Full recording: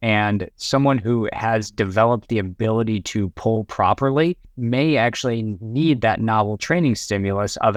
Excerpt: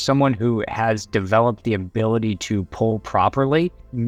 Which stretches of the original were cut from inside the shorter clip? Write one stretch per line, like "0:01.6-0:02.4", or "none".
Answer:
none